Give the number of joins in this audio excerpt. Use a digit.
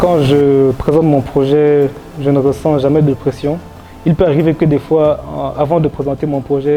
0